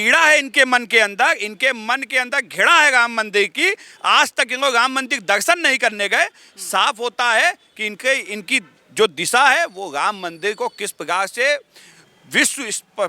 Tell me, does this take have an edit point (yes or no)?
no